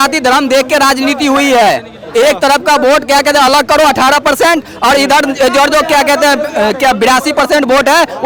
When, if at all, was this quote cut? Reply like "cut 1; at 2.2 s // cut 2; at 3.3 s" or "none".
none